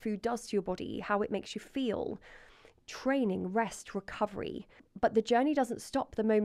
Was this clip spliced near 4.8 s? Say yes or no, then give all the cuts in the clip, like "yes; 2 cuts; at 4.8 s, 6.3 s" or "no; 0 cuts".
yes; 1 cut; at 4.8 s